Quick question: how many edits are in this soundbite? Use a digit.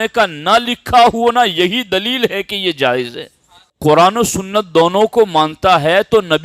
1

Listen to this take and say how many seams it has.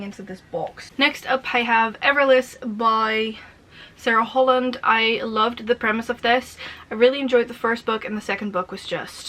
0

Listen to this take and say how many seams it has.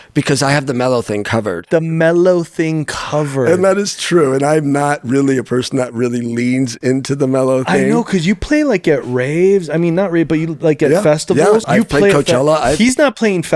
2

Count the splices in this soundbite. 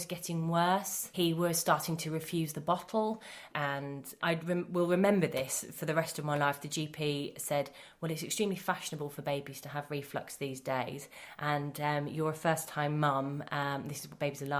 2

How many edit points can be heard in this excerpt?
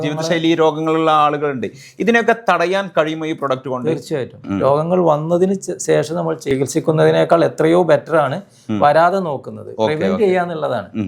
2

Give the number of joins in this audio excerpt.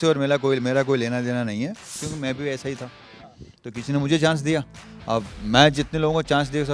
1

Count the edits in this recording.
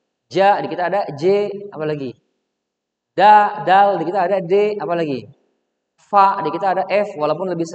0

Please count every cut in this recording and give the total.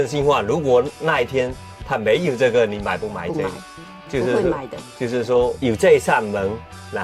0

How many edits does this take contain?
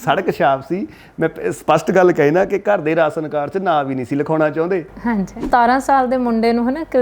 1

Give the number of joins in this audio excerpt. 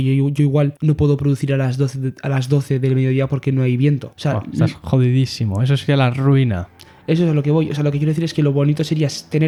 0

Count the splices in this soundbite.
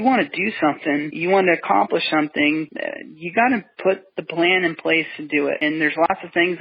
2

